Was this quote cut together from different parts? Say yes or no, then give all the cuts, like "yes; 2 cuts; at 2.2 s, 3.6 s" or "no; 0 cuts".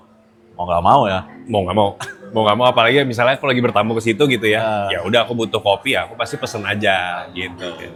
no; 0 cuts